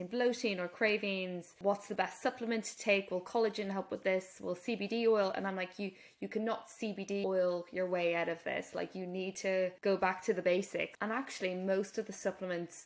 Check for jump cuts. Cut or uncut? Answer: cut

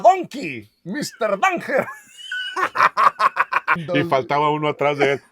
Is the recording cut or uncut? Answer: cut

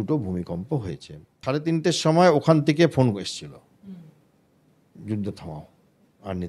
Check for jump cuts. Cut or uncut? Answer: cut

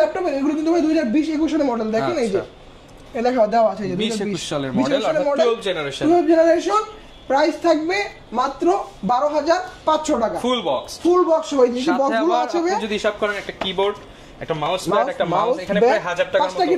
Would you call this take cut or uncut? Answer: uncut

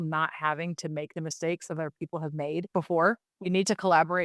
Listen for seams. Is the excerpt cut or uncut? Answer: cut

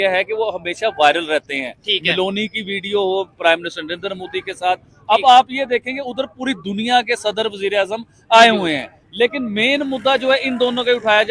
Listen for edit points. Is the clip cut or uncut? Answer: uncut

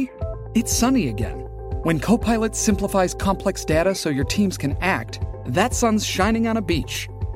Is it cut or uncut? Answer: uncut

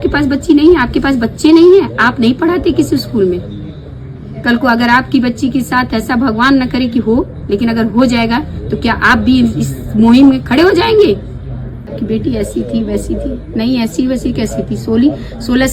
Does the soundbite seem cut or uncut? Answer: cut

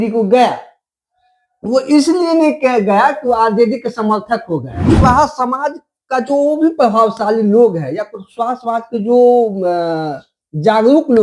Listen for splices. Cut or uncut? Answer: cut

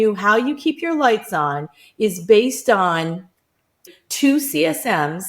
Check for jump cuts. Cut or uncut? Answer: cut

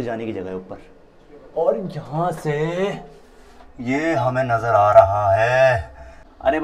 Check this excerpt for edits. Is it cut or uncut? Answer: uncut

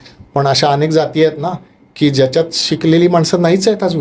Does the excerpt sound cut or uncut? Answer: uncut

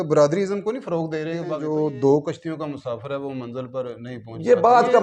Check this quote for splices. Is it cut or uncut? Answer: cut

